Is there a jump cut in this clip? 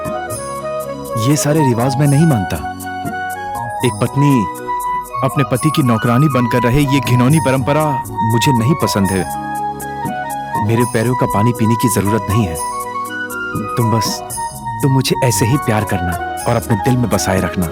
no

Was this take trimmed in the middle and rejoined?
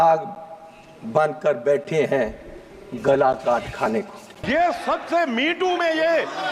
yes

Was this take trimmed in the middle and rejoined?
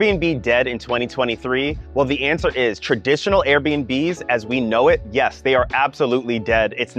no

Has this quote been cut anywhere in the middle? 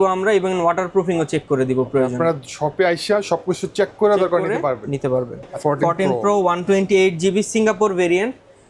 no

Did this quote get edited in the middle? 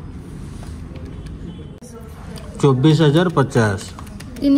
yes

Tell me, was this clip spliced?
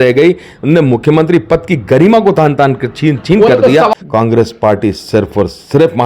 yes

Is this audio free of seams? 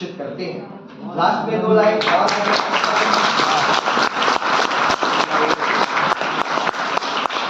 yes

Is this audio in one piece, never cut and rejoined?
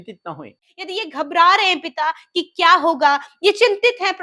no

